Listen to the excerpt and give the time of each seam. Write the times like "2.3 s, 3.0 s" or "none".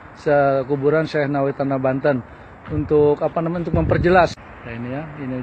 4.5 s